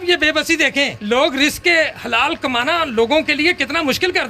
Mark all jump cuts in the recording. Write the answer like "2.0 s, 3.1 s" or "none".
1.0 s